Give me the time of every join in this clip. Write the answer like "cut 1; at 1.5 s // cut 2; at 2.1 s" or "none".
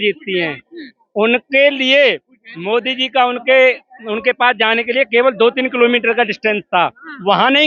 none

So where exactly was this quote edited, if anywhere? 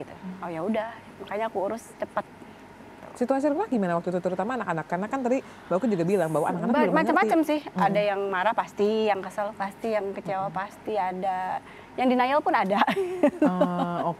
none

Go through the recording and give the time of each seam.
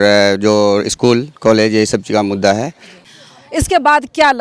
cut 1; at 3.0 s

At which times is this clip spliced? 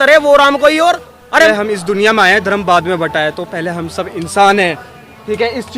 cut 1; at 1.5 s

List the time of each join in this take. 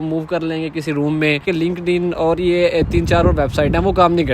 cut 1; at 1.4 s

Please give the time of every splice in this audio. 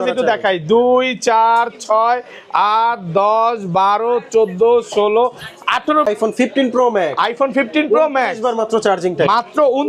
cut 1; at 6.1 s

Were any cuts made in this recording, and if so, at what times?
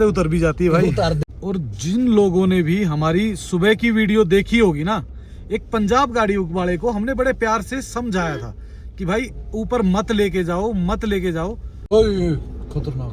cut 1; at 1.3 s // cut 2; at 11.7 s

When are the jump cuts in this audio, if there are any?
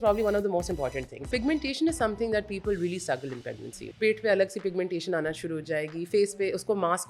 cut 1; at 1.3 s // cut 2; at 3.8 s

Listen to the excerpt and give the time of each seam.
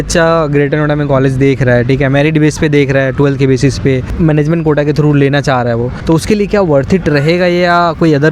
none

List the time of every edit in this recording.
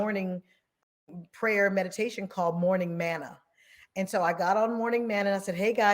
cut 1; at 1.2 s

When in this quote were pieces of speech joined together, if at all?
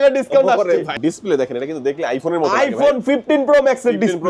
cut 1; at 0.9 s

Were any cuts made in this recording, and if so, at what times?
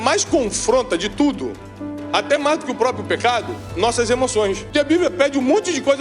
cut 1; at 4.6 s

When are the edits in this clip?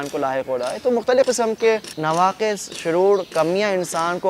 cut 1; at 1.9 s

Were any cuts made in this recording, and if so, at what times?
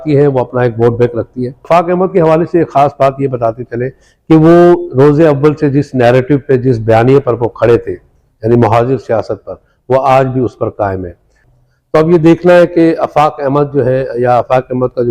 cut 1; at 1.7 s // cut 2; at 11.4 s

